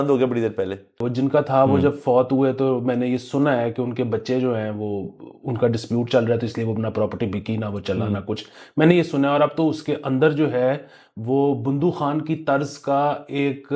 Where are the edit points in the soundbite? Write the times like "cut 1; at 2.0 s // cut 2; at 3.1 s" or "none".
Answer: cut 1; at 1.0 s